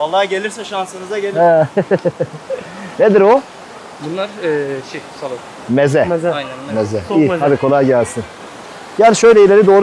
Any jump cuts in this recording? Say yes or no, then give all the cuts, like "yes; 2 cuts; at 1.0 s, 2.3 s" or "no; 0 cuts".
no; 0 cuts